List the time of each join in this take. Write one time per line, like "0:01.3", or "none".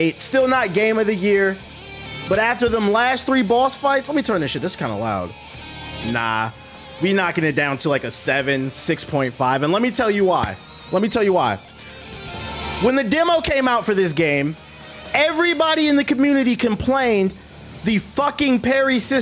none